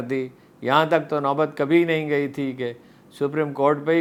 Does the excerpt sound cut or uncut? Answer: uncut